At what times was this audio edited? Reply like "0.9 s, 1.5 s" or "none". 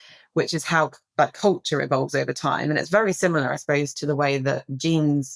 none